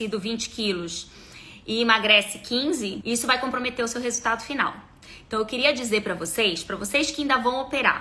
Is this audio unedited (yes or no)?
no